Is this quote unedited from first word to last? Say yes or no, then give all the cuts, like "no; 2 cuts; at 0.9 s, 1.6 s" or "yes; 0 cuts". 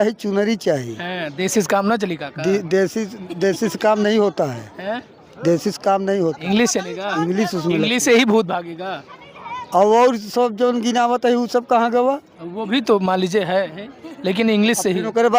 yes; 0 cuts